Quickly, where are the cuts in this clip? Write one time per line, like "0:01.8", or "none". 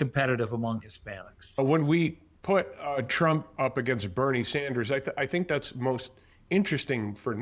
0:01.6